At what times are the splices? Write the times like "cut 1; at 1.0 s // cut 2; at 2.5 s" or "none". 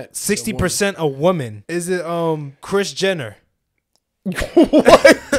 cut 1; at 1.6 s // cut 2; at 2.5 s